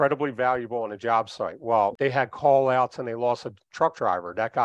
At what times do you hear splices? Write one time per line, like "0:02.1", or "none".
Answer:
0:01.9